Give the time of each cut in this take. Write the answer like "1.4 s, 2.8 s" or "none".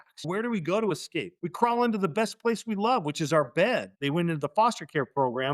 3.9 s